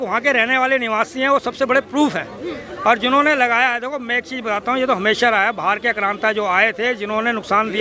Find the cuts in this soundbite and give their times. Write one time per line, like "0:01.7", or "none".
none